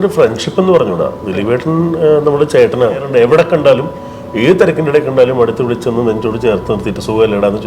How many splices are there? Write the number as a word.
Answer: one